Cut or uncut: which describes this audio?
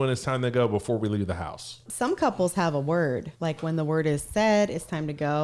cut